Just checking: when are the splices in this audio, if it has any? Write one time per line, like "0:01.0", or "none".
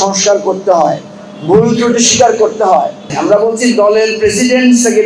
0:03.0

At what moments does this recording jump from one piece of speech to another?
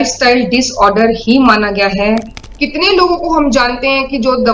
0:02.3

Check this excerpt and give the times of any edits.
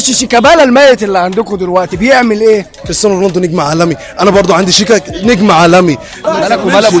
0:02.8
0:06.1

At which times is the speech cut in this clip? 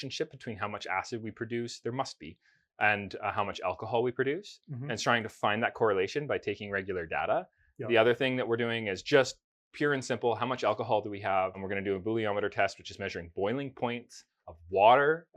0:11.6

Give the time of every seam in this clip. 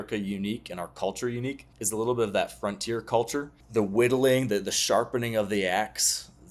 0:01.7
0:03.6

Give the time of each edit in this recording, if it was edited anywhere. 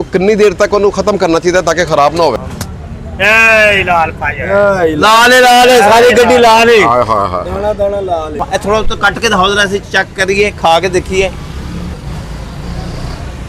0:02.3
0:08.4
0:11.9

